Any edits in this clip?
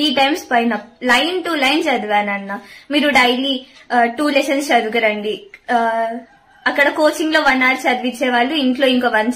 no; 0 cuts

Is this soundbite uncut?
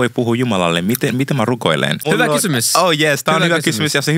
yes; 0 cuts

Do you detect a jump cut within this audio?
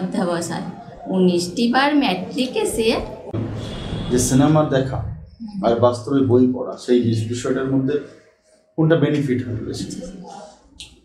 yes; 1 cut; at 3.3 s

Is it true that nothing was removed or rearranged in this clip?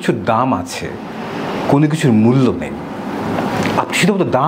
yes; 0 cuts

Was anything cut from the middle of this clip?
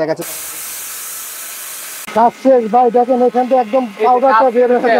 yes; 1 cut; at 2.1 s

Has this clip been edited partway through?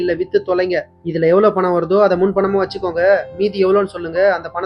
no; 0 cuts

